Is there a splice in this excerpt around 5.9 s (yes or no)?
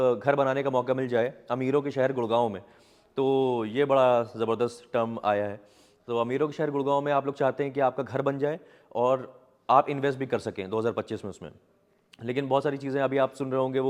no